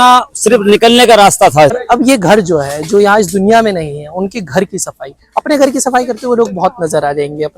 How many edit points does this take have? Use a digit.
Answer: 1